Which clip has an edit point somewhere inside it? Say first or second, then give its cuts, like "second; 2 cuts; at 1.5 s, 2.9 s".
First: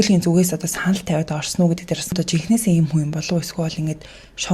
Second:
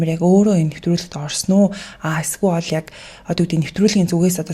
first; 1 cut; at 2.1 s